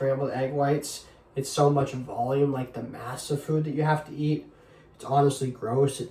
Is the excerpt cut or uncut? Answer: uncut